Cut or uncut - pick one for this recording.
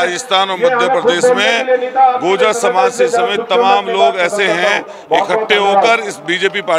uncut